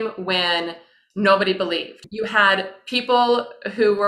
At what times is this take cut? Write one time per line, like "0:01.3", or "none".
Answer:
0:02.0